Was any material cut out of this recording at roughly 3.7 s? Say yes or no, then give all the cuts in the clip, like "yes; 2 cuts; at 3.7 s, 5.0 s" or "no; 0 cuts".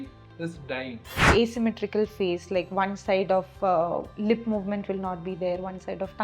no; 1 cut; at 1.2 s